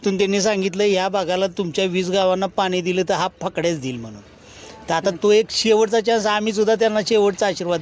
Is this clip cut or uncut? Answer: uncut